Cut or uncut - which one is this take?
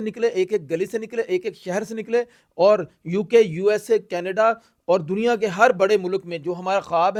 uncut